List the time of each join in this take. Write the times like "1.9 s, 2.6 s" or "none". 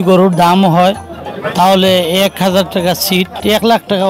none

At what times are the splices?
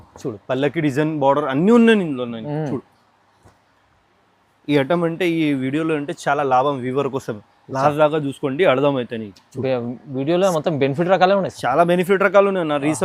none

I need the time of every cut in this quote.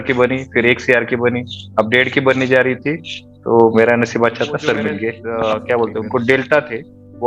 5.2 s

